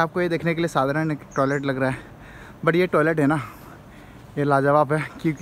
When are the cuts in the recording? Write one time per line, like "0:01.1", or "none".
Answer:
none